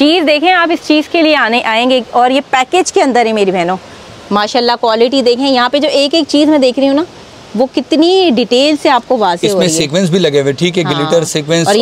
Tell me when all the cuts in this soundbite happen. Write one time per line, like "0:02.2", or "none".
none

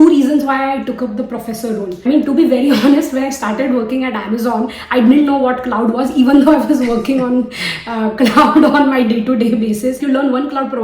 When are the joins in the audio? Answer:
0:01.9
0:10.0

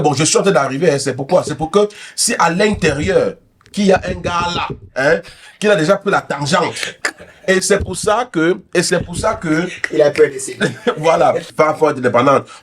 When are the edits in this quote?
0:11.5

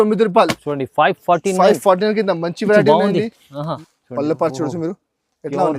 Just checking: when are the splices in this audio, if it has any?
0:03.7

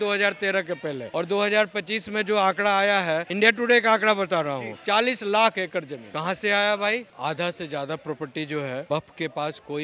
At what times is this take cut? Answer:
0:01.0
0:03.3
0:06.0
0:07.1
0:08.8

